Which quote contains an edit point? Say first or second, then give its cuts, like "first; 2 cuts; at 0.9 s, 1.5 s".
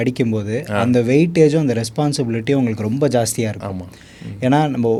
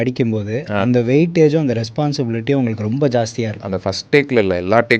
second; 1 cut; at 3.6 s